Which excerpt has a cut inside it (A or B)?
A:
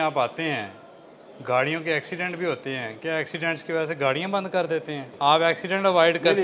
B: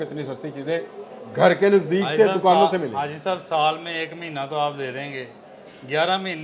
A